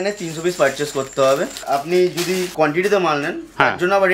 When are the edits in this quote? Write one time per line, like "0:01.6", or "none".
0:01.5